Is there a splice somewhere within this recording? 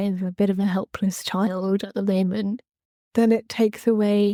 no; 0 cuts

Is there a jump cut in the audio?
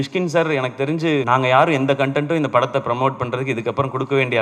yes; 1 cut; at 1.2 s

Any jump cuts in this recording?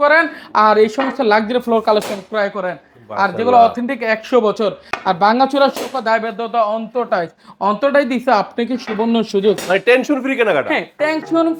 no; 0 cuts

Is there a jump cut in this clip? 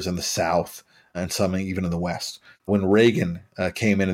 yes; 2 cuts; at 1.1 s, 2.7 s

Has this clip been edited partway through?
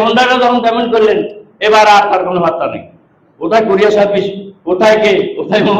no; 0 cuts

